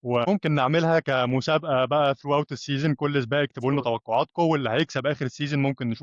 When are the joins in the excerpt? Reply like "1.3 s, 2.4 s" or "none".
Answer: none